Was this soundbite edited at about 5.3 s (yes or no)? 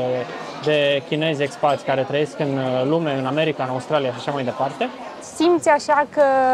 yes